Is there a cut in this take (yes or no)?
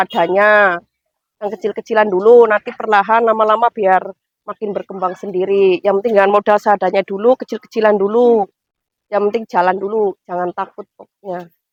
no